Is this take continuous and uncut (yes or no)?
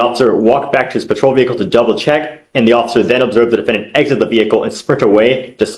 yes